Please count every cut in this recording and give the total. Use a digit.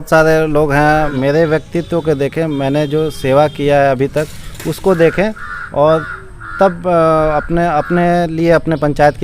1